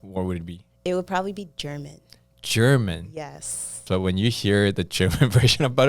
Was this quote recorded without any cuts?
no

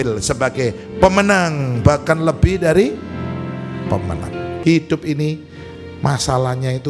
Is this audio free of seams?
no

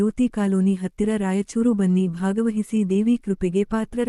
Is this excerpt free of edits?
yes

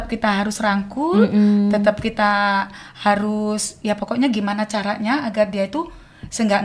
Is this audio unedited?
yes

